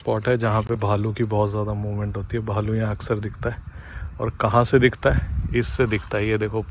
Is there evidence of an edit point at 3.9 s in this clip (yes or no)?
no